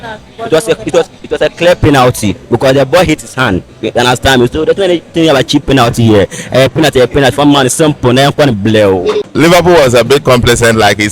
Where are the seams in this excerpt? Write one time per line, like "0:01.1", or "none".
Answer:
0:09.3